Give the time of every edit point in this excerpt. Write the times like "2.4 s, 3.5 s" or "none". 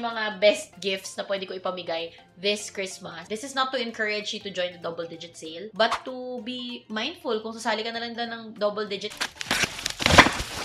3.3 s, 9.1 s